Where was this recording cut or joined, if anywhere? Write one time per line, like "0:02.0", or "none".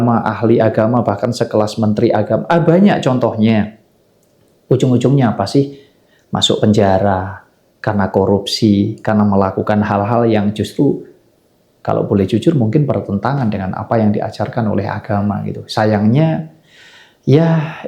none